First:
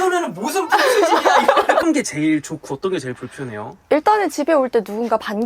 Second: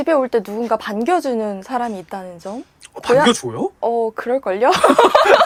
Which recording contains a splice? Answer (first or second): first